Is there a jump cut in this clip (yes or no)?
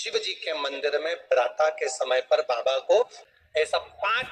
yes